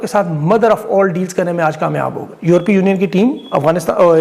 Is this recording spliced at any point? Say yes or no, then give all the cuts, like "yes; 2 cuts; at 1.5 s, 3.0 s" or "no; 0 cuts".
no; 0 cuts